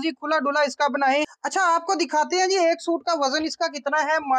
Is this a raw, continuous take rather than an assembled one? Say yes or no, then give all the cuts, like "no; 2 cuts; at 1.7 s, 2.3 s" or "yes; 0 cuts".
no; 1 cut; at 1.4 s